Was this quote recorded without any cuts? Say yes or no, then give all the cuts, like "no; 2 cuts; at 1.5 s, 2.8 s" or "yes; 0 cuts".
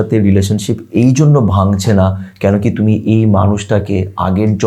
yes; 0 cuts